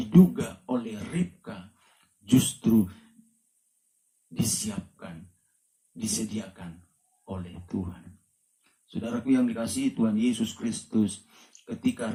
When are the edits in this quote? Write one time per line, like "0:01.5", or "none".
none